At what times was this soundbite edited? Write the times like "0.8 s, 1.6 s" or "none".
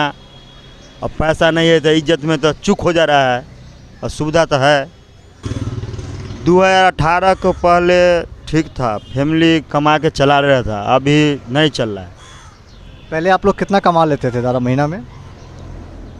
5.5 s